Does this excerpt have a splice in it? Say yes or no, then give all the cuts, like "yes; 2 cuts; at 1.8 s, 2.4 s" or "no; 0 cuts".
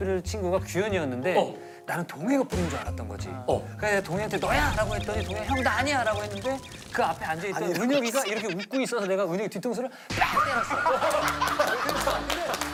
no; 0 cuts